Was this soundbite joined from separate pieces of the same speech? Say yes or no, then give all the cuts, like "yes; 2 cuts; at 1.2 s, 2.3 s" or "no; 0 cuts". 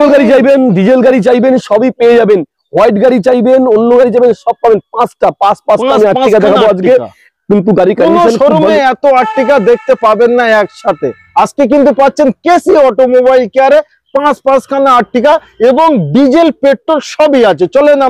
no; 0 cuts